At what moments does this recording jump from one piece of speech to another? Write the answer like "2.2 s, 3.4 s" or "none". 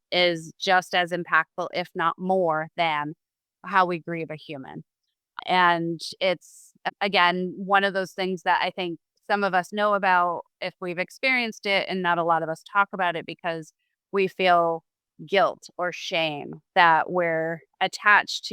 5.4 s, 6.7 s